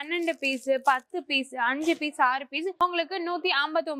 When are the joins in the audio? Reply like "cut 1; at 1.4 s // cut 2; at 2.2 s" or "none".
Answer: none

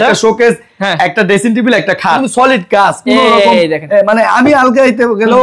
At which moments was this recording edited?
cut 1; at 2.2 s

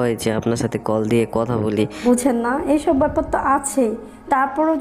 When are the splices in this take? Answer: cut 1; at 2.0 s

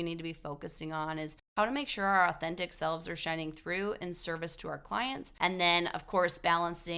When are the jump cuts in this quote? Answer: cut 1; at 5.3 s

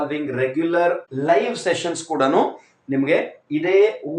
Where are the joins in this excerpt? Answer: cut 1; at 1.1 s

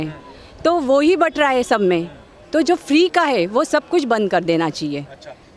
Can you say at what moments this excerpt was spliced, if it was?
none

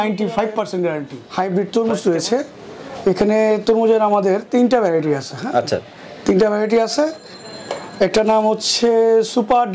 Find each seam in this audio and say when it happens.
cut 1; at 1.2 s

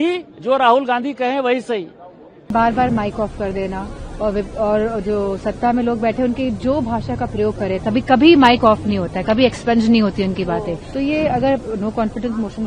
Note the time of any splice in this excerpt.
cut 1; at 2.5 s // cut 2; at 10.8 s

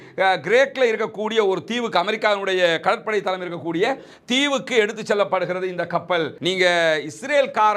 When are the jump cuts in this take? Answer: cut 1; at 6.3 s

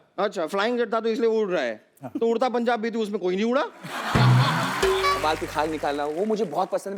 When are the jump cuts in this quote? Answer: cut 1; at 5.2 s

